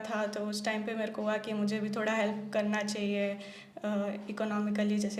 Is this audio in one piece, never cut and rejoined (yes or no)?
yes